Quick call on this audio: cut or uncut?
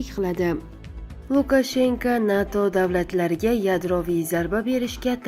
cut